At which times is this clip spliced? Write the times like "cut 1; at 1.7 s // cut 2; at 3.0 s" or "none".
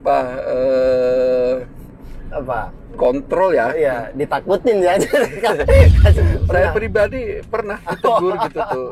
cut 1; at 6.1 s